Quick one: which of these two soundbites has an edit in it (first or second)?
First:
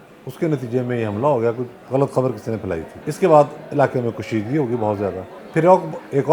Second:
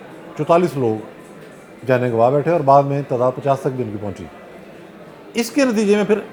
first